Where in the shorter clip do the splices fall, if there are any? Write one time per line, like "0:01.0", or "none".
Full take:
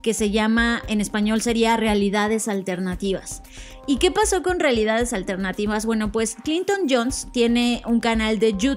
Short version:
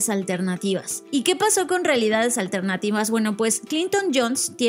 0:00.9